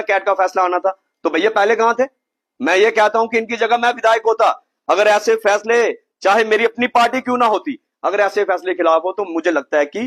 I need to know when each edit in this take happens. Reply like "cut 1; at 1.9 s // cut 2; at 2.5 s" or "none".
none

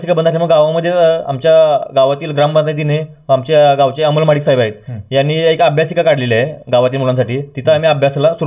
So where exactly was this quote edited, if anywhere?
none

